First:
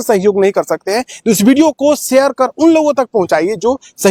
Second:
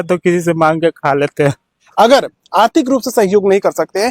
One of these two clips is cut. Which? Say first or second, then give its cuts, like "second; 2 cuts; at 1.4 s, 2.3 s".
second; 1 cut; at 1.8 s